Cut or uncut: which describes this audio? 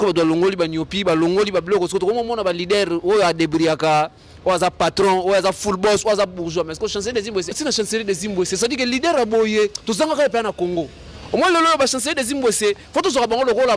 cut